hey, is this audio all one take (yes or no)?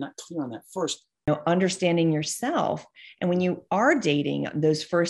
no